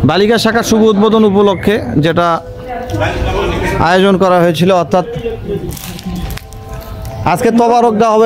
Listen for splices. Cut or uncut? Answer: uncut